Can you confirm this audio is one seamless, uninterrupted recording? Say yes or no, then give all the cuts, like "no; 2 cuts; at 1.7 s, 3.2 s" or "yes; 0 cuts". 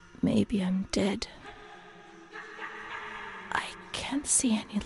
yes; 0 cuts